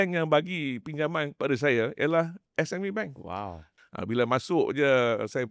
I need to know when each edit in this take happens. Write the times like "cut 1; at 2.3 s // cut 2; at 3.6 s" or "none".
cut 1; at 3.7 s